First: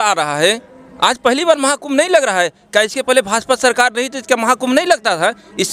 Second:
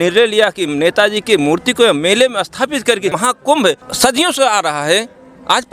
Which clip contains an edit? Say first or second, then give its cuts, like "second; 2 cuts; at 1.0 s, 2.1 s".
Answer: second; 1 cut; at 3.3 s